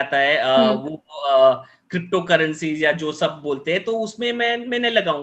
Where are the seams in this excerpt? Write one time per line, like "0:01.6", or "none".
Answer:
none